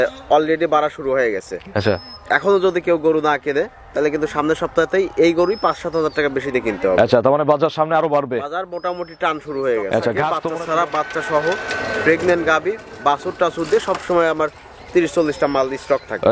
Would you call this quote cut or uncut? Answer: cut